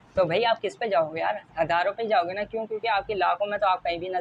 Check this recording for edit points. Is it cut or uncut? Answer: uncut